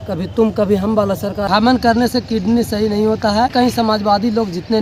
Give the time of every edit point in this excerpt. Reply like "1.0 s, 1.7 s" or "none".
1.4 s, 3.5 s